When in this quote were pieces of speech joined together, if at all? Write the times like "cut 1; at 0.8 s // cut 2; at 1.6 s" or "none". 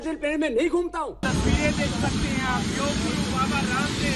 cut 1; at 1.2 s